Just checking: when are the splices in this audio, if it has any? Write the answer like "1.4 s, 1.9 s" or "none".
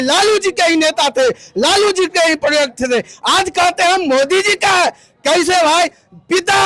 none